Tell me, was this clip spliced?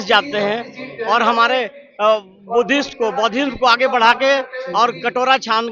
no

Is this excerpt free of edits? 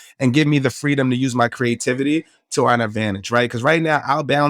yes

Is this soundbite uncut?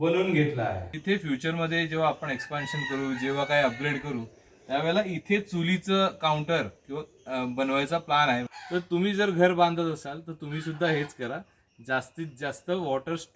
no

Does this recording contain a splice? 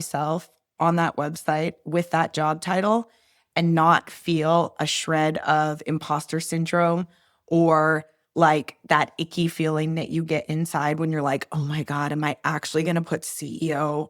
no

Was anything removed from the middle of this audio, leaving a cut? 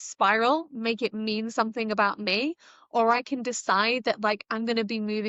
no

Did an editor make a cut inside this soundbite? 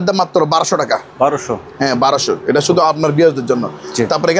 no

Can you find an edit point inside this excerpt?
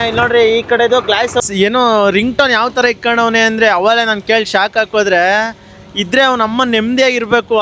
yes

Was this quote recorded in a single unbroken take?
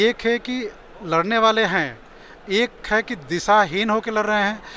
yes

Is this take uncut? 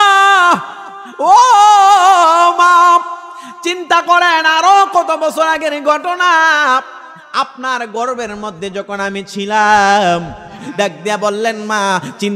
no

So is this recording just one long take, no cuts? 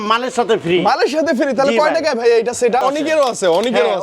no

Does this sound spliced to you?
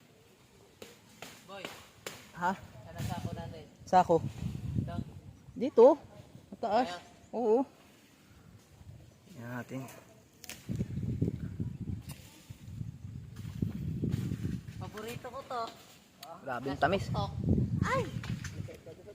no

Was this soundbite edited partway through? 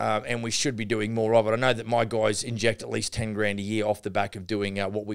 yes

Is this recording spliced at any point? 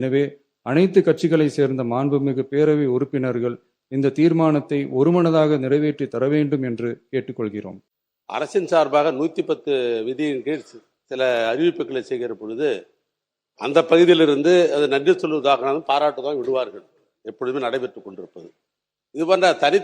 yes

